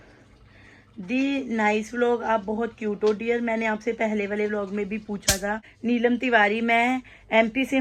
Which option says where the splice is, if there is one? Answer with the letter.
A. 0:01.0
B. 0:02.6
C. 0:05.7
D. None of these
C